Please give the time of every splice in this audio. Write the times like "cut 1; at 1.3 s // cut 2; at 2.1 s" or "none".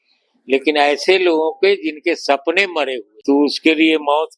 cut 1; at 3.1 s